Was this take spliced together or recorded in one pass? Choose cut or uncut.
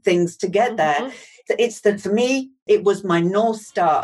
cut